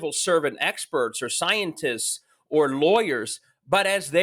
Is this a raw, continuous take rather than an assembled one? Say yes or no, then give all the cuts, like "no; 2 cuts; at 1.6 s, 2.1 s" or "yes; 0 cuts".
yes; 0 cuts